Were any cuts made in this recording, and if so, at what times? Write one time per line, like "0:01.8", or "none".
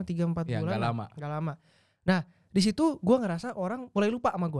none